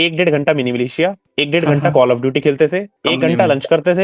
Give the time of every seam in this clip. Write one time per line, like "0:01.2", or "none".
none